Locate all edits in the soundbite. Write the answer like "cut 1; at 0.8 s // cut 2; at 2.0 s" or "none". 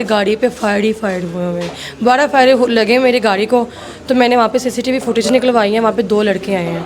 none